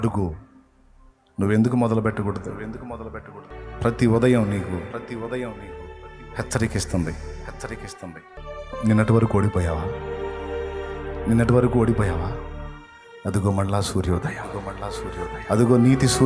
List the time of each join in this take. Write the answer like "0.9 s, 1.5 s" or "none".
3.5 s, 8.4 s